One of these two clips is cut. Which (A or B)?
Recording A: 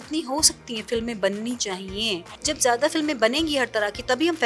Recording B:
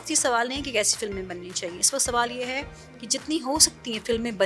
A